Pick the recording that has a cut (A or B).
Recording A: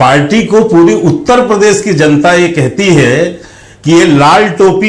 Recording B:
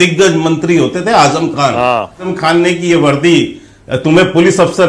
B